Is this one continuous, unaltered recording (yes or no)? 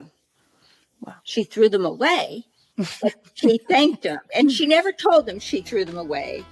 yes